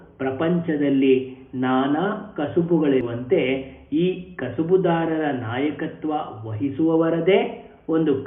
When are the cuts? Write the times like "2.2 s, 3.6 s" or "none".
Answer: 5.5 s